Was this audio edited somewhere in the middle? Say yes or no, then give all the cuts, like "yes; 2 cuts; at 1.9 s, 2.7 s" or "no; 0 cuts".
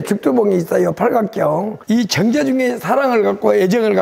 yes; 1 cut; at 1.8 s